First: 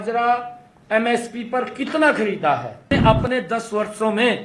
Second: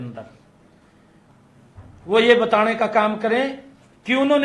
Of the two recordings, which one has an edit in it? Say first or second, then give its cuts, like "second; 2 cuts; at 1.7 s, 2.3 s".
first; 1 cut; at 2.9 s